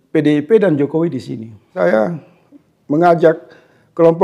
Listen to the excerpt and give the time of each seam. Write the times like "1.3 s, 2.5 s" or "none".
1.8 s